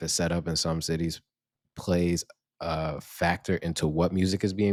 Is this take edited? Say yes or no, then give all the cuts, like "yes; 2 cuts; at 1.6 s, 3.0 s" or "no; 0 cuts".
no; 0 cuts